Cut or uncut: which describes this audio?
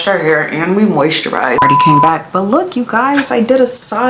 cut